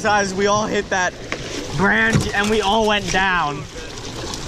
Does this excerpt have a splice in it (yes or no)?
no